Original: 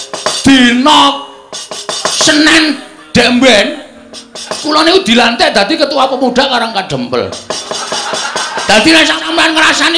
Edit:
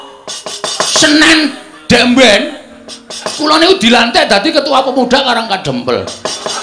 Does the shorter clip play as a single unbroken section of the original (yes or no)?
yes